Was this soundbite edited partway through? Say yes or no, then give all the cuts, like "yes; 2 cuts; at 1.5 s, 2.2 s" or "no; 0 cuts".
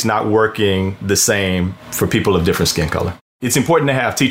yes; 2 cuts; at 1.8 s, 3.4 s